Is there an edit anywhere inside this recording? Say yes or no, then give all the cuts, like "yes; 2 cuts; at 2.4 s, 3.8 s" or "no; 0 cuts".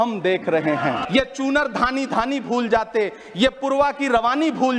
yes; 1 cut; at 1.0 s